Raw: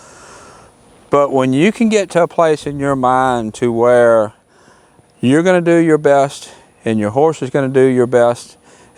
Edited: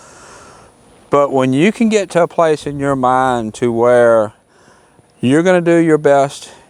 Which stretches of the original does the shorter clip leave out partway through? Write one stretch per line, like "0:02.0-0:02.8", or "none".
none

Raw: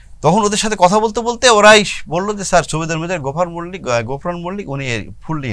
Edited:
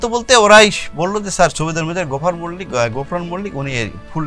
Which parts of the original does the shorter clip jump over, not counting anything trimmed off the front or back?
none

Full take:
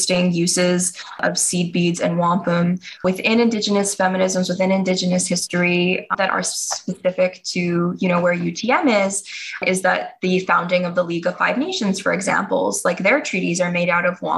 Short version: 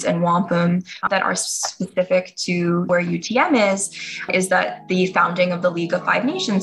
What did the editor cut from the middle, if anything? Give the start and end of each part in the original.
0:02.9-0:06.0
0:08.0-0:08.2

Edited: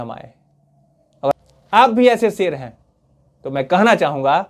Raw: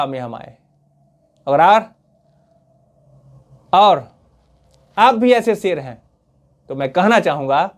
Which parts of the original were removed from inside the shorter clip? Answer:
0:01.6-0:04.6

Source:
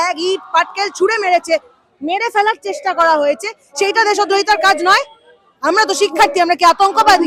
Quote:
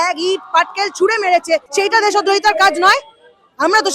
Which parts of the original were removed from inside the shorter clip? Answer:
0:01.7-0:03.7

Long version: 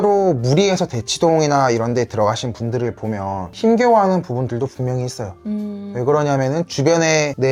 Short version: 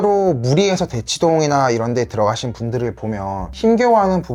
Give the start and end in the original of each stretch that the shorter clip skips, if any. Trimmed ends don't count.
none

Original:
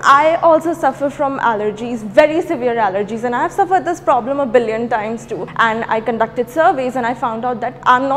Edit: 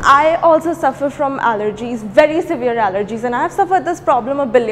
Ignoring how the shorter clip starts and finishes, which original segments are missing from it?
none

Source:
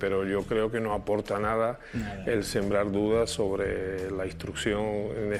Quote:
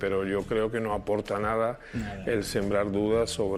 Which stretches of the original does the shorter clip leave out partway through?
none

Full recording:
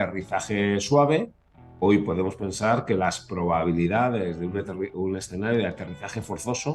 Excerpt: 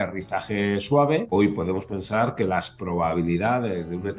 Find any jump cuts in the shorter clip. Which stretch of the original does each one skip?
0:01.3-0:01.8

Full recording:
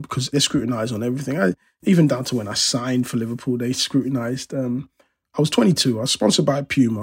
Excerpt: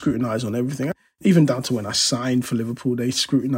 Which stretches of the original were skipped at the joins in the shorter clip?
0:01.4-0:01.5

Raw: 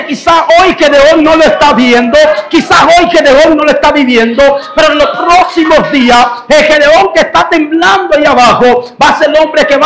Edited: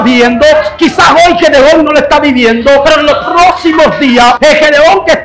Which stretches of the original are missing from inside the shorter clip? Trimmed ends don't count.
0:04.6-0:04.8
0:06.3-0:06.5

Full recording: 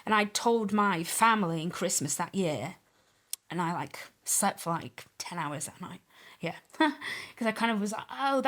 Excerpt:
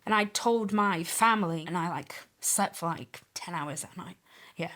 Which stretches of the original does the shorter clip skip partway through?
0:01.6-0:03.5

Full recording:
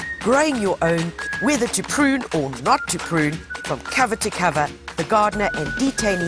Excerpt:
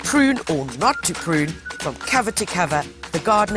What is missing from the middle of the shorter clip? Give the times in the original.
none

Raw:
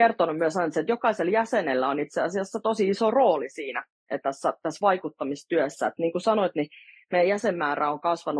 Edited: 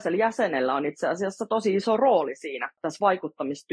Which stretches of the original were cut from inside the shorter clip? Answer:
0:04.0-0:04.6

